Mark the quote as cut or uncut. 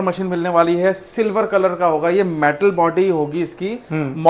uncut